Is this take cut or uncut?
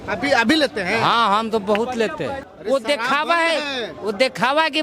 cut